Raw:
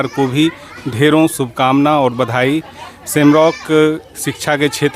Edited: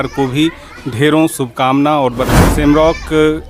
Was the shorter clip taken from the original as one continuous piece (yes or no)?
no